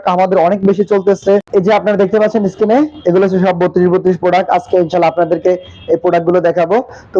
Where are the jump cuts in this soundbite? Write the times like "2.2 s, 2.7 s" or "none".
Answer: 1.5 s